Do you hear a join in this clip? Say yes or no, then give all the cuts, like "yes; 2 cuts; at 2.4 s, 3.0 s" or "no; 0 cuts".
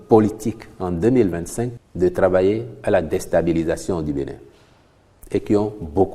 yes; 1 cut; at 1.8 s